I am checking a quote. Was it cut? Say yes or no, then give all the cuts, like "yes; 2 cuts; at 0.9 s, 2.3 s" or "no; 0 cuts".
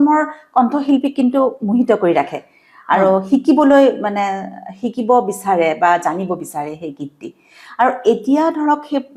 no; 0 cuts